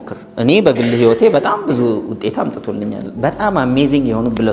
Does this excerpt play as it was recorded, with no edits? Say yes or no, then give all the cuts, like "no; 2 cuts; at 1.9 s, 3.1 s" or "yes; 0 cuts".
yes; 0 cuts